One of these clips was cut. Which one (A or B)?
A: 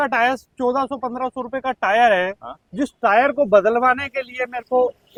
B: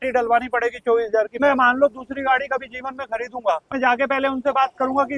B